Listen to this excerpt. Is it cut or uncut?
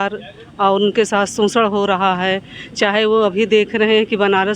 uncut